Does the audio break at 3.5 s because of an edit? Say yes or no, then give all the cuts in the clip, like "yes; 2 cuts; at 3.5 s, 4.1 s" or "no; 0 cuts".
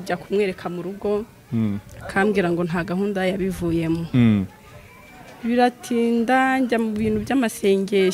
no; 0 cuts